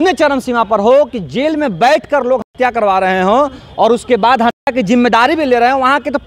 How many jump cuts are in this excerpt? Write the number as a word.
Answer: zero